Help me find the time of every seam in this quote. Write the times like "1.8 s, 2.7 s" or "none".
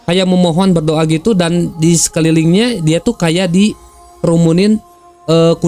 none